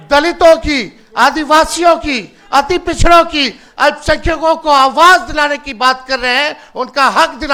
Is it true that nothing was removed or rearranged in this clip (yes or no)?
yes